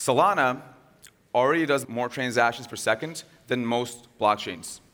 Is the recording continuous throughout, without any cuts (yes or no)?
no